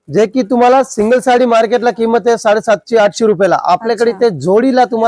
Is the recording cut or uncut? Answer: uncut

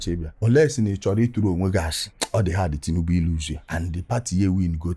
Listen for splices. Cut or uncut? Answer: uncut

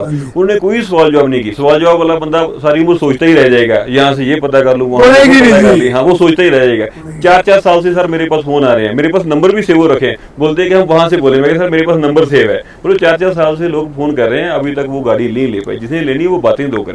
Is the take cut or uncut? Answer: uncut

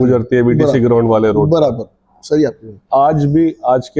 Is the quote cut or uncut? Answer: uncut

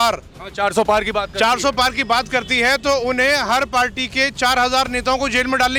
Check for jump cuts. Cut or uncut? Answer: uncut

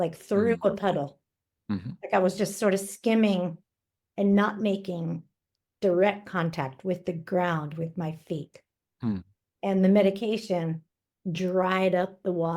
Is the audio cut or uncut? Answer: uncut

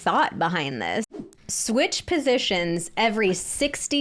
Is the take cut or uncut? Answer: cut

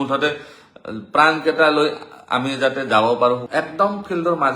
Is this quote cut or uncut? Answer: cut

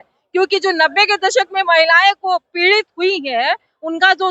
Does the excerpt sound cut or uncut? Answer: uncut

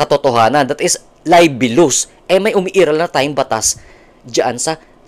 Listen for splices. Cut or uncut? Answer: uncut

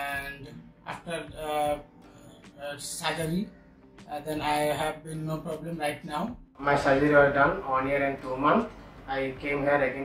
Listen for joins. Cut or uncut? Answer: cut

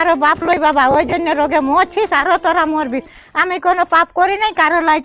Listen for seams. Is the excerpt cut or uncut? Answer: uncut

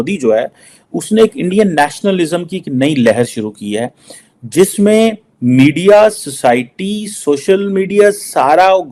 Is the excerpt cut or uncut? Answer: uncut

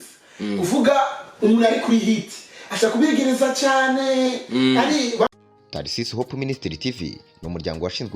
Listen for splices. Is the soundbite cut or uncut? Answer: cut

